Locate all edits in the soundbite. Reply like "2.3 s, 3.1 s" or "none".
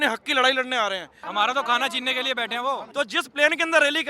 1.2 s, 2.9 s